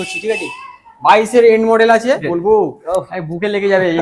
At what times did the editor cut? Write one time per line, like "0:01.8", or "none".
0:02.2

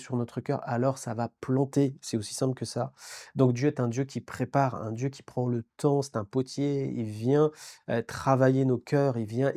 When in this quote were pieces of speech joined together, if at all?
none

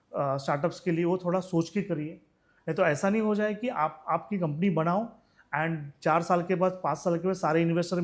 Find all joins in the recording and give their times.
none

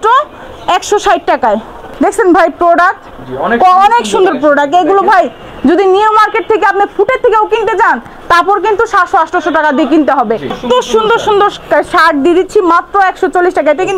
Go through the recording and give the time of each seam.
0:01.8
0:10.6

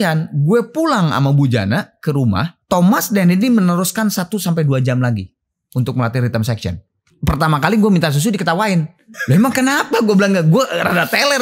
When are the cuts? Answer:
0:02.5
0:07.1
0:09.1

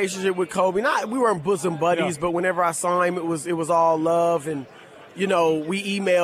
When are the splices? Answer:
none

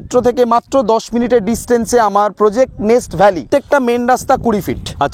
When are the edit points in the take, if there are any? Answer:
0:03.4

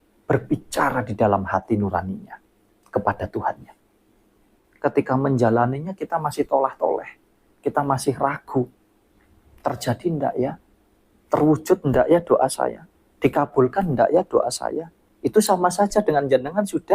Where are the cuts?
0:04.7

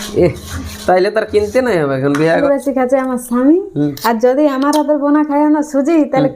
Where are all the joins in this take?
0:02.4

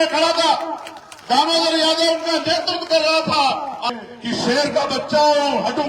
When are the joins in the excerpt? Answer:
0:03.9

